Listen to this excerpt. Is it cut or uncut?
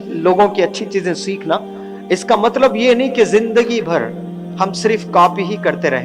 uncut